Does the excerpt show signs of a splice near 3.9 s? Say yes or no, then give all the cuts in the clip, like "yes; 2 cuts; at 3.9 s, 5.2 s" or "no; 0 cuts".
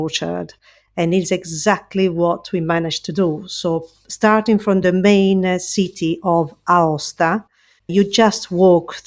no; 1 cut; at 7.8 s